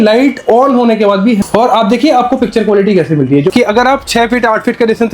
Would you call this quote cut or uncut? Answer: cut